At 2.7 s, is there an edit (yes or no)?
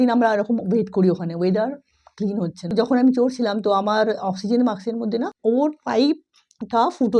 yes